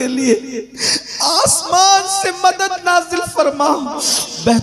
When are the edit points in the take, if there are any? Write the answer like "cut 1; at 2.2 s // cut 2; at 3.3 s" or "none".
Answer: none